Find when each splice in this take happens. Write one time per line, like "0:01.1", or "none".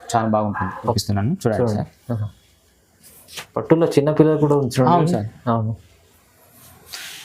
0:01.0

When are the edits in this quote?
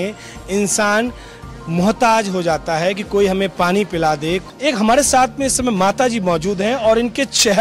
0:04.4

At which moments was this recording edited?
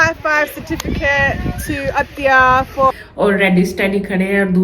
0:03.0

